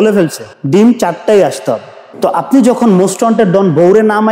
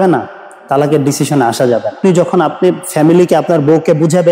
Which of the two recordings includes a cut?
second; 1 cut; at 1.9 s

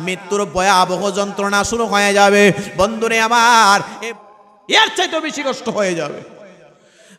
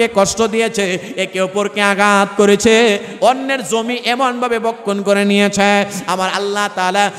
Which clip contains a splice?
first; 1 cut; at 3.9 s

